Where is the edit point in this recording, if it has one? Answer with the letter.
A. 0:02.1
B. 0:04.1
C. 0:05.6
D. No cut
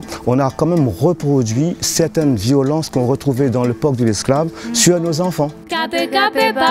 C